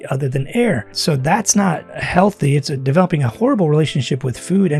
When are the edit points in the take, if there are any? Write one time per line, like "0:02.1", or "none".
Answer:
0:00.9
0:01.9